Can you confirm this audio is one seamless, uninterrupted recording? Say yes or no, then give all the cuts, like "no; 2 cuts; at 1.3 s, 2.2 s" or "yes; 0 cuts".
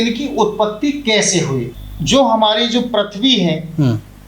no; 1 cut; at 1.7 s